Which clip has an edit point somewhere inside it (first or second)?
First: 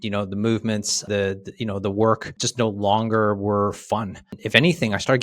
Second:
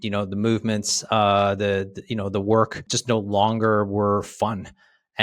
first